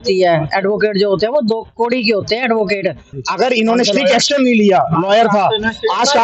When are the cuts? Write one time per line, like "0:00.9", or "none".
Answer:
0:03.1